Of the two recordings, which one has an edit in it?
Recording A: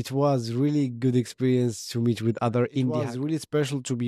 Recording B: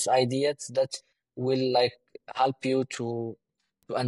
A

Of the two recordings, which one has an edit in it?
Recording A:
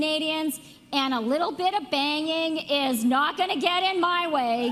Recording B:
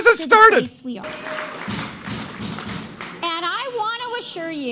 B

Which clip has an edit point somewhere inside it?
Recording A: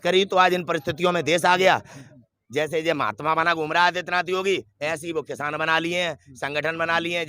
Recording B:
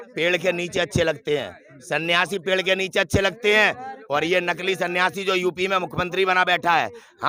A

